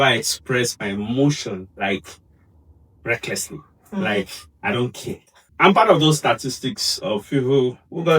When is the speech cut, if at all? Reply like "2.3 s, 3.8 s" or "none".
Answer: 5.4 s